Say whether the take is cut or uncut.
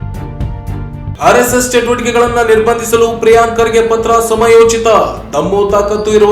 cut